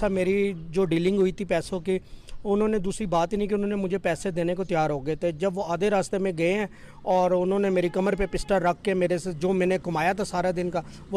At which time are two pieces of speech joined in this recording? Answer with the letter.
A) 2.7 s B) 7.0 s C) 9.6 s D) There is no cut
D